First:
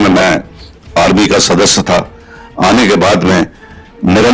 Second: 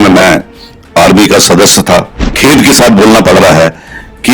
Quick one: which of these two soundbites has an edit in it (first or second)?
second